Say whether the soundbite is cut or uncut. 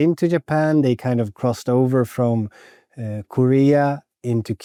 uncut